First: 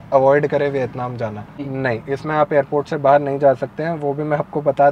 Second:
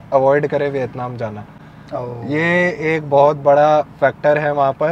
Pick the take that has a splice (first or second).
first